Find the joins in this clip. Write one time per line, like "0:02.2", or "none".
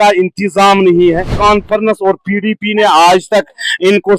0:01.4